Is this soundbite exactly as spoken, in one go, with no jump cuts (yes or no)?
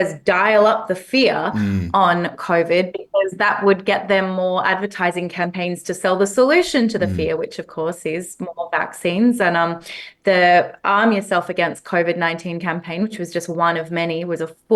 yes